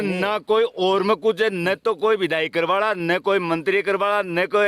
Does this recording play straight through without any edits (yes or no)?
yes